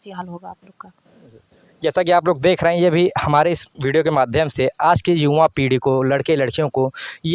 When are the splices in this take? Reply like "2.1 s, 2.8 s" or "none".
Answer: none